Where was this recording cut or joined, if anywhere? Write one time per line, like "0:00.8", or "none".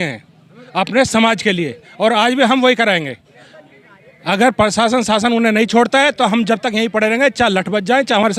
none